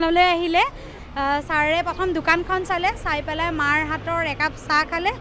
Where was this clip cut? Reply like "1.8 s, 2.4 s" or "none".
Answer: 1.0 s